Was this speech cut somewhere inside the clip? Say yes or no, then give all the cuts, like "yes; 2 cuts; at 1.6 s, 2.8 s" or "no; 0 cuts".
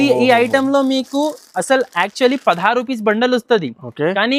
no; 0 cuts